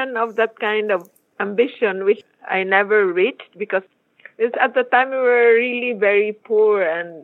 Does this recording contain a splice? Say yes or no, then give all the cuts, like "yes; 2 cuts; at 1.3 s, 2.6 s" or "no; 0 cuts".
yes; 2 cuts; at 2.2 s, 3.9 s